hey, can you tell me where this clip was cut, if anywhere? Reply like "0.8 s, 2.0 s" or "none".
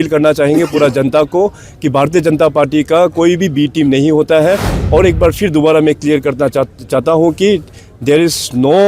4.7 s